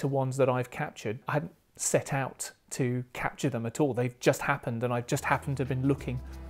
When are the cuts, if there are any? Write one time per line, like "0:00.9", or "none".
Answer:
0:01.2